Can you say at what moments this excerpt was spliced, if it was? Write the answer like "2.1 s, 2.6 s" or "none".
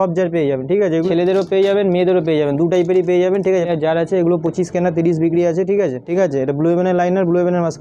1.1 s, 3.7 s, 6.0 s